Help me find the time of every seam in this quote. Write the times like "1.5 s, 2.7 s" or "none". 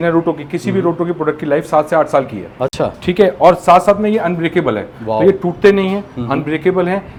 none